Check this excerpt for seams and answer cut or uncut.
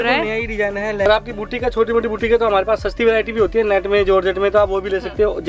cut